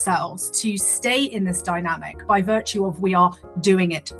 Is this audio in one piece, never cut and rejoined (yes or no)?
yes